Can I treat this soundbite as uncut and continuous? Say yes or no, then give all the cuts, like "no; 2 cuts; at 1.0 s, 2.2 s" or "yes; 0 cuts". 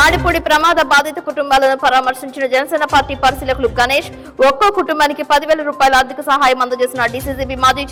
yes; 0 cuts